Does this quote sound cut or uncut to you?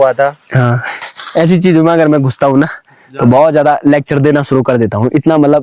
cut